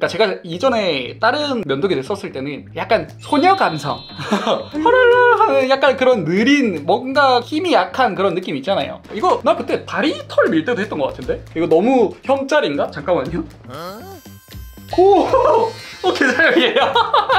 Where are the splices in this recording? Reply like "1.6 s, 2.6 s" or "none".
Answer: 9.0 s, 15.8 s